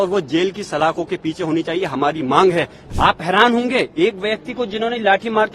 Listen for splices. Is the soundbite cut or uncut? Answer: cut